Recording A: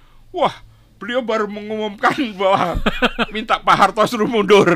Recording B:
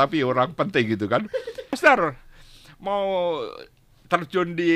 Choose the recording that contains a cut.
B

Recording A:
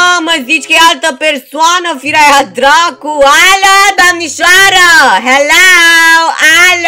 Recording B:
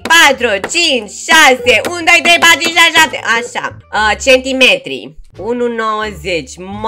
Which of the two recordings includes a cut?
B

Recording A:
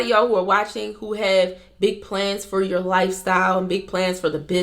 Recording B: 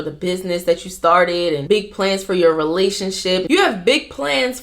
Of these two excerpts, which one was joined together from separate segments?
B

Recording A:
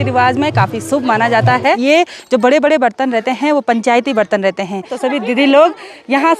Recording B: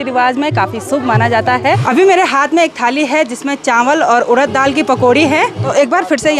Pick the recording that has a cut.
A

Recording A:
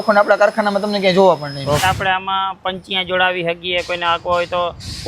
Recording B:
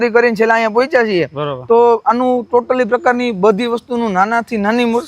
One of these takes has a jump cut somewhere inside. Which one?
A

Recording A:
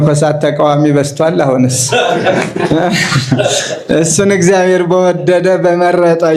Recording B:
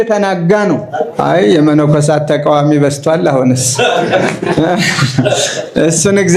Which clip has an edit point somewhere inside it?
B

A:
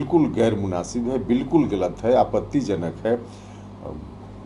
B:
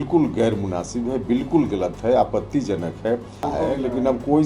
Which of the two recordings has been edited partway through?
B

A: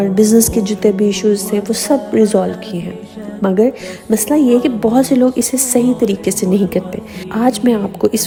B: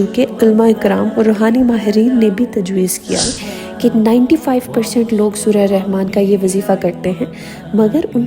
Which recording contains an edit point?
B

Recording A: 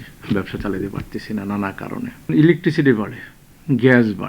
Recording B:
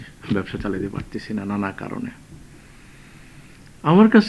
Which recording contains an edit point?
A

